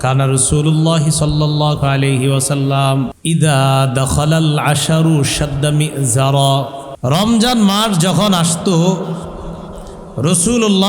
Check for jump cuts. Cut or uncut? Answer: cut